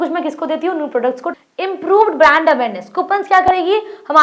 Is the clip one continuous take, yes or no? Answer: no